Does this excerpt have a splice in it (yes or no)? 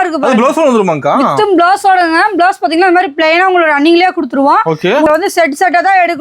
yes